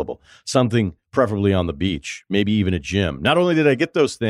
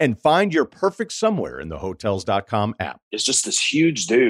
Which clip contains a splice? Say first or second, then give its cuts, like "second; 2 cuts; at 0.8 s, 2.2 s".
second; 1 cut; at 3.1 s